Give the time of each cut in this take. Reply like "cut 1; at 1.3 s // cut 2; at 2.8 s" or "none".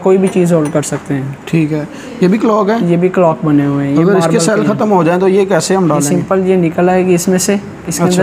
none